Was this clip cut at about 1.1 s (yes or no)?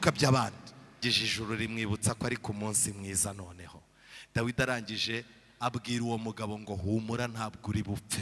yes